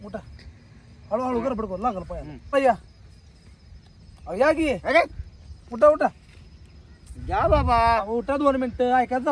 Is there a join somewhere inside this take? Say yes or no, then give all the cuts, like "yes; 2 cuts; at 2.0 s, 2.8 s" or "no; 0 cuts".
yes; 1 cut; at 2.5 s